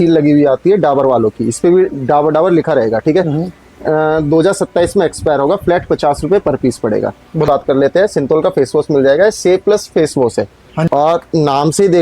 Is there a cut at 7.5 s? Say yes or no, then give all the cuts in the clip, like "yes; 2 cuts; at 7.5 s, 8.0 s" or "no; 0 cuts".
yes; 2 cuts; at 7.5 s, 10.8 s